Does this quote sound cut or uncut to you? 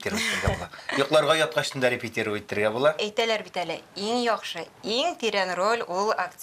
cut